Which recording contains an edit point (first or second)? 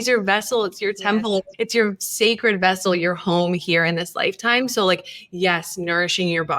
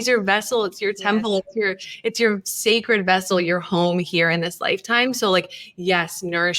first